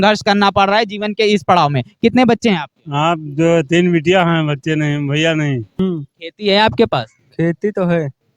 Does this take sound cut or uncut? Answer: cut